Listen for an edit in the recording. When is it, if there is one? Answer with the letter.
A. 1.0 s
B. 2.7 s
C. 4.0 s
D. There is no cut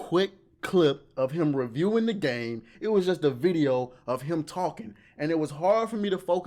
B